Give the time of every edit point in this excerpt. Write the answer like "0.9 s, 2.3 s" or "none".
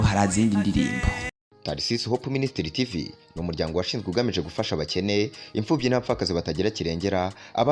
1.2 s